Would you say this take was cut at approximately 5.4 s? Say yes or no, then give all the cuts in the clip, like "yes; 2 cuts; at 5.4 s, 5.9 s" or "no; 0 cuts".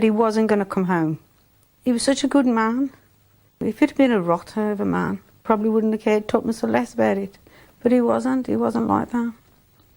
yes; 3 cuts; at 1.6 s, 3.6 s, 5.4 s